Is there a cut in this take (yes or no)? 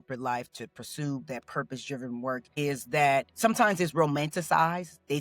no